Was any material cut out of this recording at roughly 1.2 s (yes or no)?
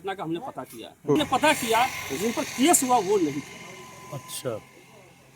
yes